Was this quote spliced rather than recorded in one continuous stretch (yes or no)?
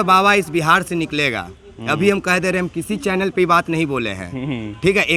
no